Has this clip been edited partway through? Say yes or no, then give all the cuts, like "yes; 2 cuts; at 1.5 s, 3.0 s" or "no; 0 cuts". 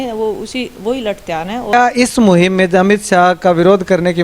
yes; 1 cut; at 1.7 s